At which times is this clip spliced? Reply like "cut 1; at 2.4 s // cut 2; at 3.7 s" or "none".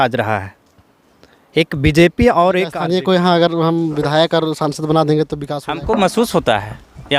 cut 1; at 2.8 s // cut 2; at 5.4 s